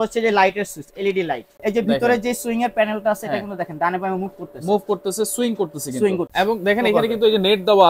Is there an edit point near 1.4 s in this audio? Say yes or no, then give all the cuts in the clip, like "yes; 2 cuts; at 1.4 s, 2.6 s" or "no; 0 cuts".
yes; 2 cuts; at 1.4 s, 6.3 s